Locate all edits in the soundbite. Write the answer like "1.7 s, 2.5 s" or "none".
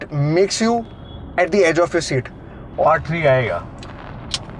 2.8 s